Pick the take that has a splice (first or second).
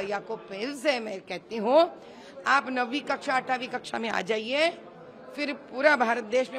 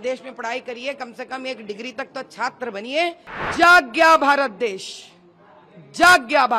second